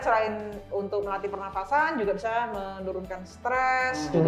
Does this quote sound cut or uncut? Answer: uncut